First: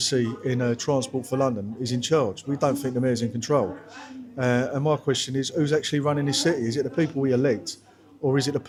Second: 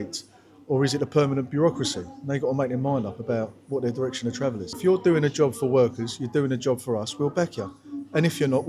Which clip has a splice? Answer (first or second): second